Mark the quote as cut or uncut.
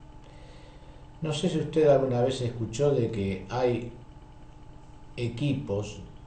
cut